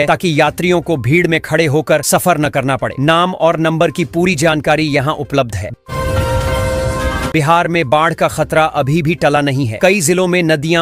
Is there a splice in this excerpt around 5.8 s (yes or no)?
yes